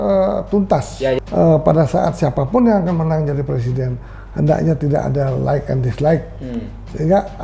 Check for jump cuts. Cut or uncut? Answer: cut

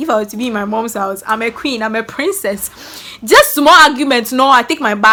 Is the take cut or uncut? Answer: uncut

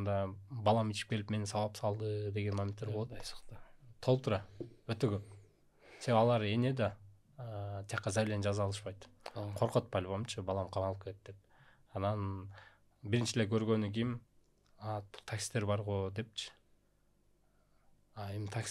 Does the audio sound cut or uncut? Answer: uncut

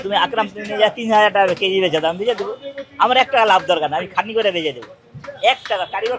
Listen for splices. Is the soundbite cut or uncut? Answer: uncut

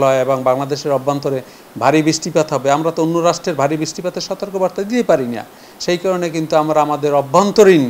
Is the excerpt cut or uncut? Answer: uncut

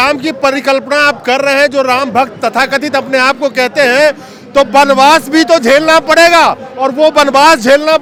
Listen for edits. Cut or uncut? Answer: uncut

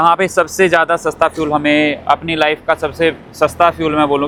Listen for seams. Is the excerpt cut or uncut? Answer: uncut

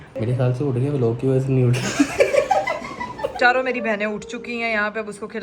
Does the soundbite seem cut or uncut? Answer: cut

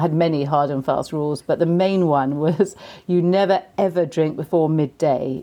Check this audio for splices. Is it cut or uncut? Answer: uncut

